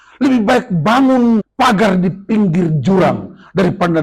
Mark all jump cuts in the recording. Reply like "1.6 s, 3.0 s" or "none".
1.5 s